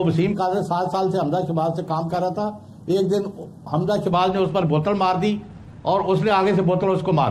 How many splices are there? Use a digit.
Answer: 0